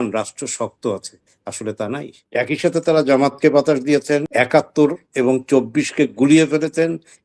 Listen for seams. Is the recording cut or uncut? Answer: cut